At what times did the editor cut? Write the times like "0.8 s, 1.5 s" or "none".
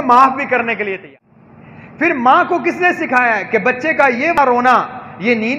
1.1 s, 4.3 s